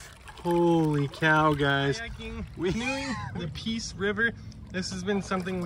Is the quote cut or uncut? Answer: cut